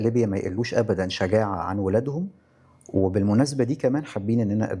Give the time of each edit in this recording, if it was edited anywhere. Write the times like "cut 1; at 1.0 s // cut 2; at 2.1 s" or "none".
none